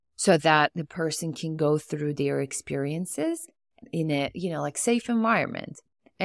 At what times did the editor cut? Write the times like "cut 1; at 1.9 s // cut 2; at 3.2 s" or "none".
cut 1; at 3.8 s